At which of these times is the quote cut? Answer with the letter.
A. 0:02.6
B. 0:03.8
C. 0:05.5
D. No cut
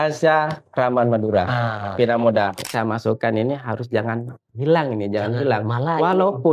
A